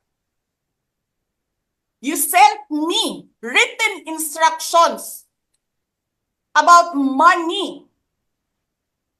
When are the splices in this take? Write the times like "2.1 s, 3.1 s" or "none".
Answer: none